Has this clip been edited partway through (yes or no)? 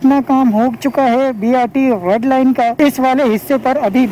yes